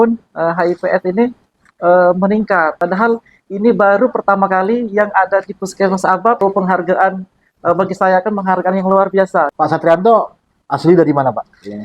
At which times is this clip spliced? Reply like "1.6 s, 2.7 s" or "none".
2.8 s, 6.4 s, 9.5 s